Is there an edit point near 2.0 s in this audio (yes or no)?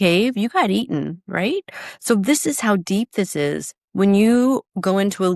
no